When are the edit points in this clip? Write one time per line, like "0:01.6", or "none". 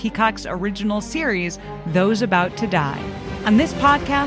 0:03.3